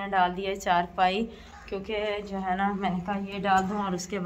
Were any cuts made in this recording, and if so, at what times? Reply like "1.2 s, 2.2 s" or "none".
none